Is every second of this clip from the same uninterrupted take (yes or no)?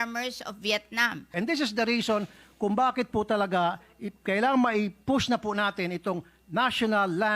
no